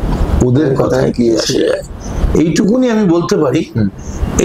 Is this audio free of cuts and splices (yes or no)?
yes